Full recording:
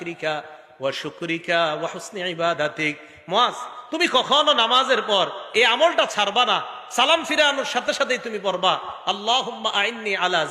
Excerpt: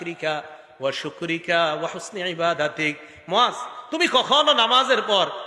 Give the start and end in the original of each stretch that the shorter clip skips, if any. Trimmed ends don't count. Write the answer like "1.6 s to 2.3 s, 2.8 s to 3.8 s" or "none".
none